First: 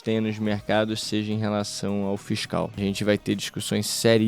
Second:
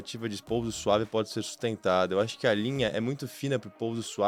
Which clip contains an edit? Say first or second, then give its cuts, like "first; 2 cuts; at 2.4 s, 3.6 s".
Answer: first; 1 cut; at 2.8 s